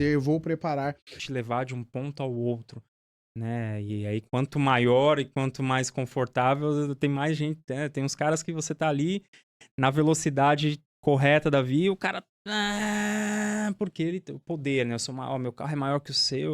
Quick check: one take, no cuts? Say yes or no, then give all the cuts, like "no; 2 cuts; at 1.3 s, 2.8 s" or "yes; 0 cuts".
no; 2 cuts; at 1.2 s, 13.2 s